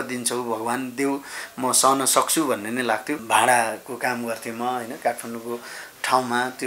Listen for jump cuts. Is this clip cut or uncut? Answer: cut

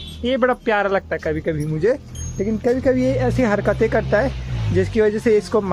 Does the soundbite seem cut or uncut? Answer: uncut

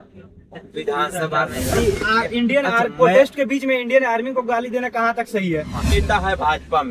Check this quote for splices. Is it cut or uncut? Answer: cut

